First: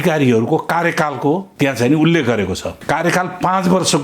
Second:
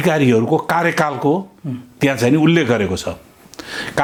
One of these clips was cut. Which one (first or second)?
first